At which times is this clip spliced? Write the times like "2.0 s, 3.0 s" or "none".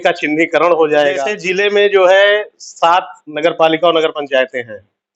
1.4 s

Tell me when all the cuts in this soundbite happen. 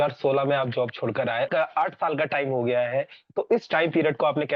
1.5 s

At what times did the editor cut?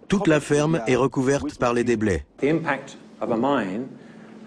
2.3 s

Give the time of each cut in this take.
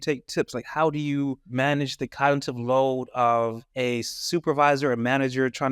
1.4 s, 3.6 s

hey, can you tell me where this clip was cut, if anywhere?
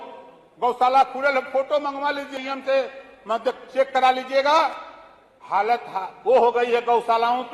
2.3 s

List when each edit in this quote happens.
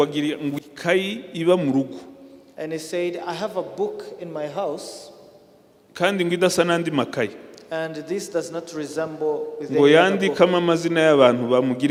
none

